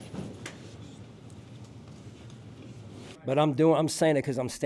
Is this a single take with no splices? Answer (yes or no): no